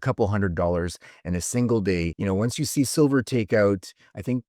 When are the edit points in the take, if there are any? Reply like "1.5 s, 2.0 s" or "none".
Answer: 2.1 s